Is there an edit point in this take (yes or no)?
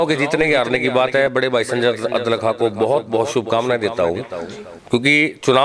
no